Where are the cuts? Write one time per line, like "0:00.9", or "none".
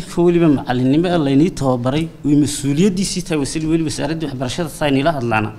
none